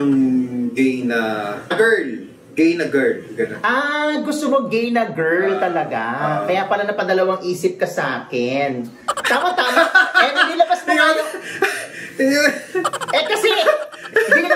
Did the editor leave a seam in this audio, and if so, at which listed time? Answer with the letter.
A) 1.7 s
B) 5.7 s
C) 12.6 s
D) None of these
A